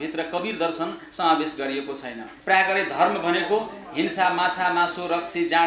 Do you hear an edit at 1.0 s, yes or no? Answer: no